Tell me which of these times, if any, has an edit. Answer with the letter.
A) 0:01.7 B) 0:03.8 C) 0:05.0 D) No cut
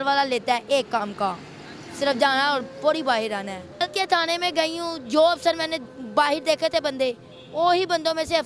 B